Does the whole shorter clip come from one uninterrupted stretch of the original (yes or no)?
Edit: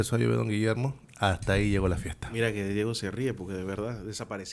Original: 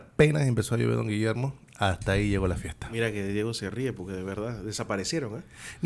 yes